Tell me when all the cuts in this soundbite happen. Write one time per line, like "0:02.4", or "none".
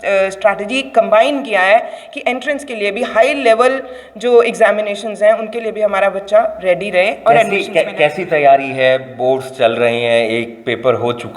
none